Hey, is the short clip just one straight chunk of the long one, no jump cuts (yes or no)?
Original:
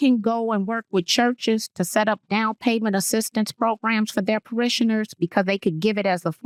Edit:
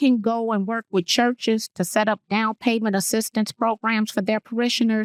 yes